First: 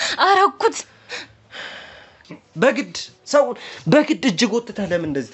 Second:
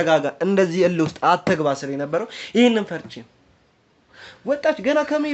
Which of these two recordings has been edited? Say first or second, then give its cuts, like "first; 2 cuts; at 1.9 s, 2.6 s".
first; 1 cut; at 2.1 s